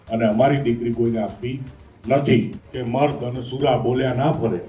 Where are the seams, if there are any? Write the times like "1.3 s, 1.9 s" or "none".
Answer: 2.6 s